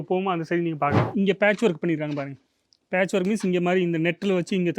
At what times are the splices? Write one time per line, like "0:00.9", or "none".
0:01.1